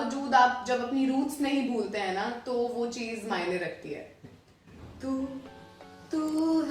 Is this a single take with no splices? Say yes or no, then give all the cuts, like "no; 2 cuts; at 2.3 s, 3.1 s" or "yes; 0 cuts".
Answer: no; 1 cut; at 4.2 s